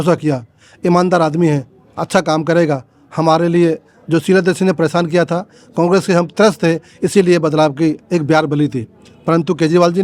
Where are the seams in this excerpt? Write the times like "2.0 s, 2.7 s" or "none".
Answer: none